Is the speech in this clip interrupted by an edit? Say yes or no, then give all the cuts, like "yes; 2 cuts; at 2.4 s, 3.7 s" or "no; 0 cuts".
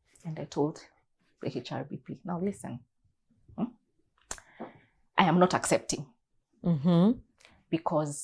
no; 0 cuts